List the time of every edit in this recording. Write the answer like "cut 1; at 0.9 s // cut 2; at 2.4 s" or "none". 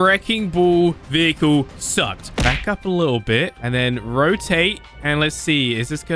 cut 1; at 2.3 s